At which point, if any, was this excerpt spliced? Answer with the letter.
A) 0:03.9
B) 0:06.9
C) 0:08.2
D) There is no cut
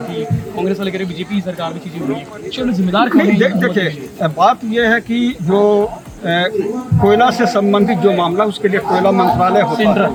D